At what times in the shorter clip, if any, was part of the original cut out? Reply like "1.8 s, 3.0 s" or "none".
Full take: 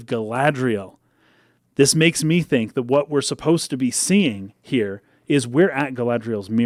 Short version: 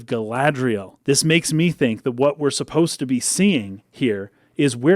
0.9 s